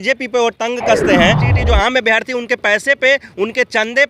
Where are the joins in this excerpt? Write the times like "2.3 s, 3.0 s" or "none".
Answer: 1.4 s